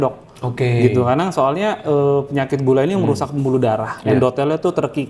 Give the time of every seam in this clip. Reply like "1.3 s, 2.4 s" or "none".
none